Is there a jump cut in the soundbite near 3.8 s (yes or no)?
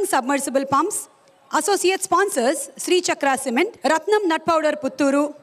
yes